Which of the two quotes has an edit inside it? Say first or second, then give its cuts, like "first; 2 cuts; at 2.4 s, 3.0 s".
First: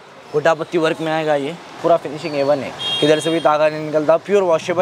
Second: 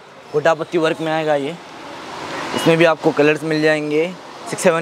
first; 1 cut; at 1.7 s